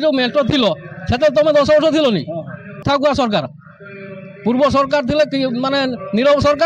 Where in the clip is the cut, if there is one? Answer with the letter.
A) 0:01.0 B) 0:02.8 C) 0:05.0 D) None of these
B